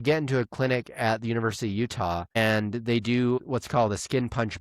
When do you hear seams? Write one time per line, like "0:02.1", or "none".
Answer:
0:03.4